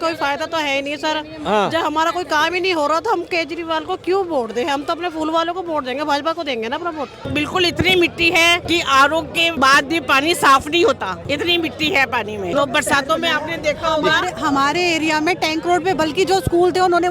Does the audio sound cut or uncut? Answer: cut